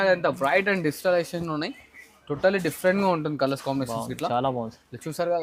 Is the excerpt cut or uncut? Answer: uncut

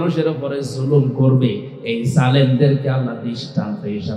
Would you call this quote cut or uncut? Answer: uncut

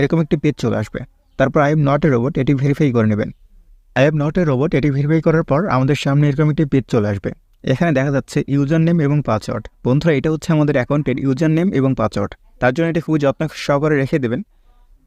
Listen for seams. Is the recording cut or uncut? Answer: uncut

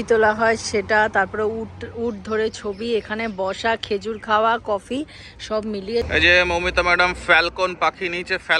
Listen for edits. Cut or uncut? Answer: cut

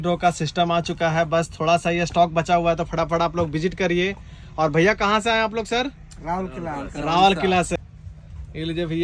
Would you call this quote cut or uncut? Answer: cut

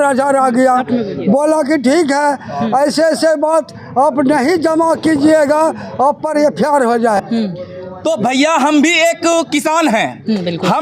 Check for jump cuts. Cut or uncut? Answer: cut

